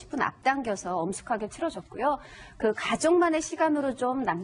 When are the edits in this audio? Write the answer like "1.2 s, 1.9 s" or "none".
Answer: none